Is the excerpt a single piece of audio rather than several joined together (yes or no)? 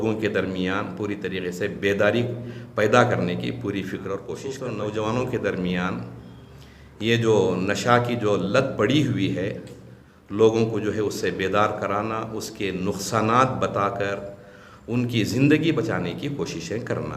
no